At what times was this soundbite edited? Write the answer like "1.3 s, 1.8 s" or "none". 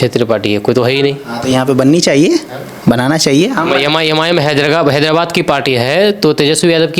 none